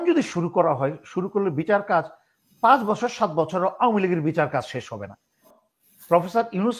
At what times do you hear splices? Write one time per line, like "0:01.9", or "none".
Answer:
0:05.5